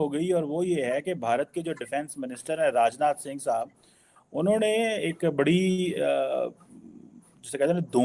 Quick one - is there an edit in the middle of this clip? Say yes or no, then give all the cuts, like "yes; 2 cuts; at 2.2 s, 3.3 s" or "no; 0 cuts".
no; 0 cuts